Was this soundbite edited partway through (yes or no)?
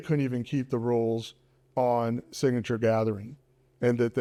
no